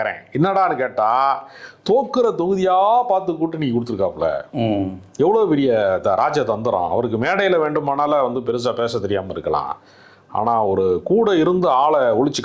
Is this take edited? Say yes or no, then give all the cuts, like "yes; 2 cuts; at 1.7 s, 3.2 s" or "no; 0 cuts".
no; 0 cuts